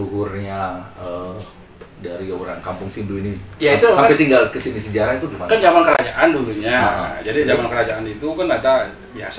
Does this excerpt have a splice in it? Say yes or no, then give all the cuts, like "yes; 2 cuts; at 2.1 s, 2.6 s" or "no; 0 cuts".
no; 0 cuts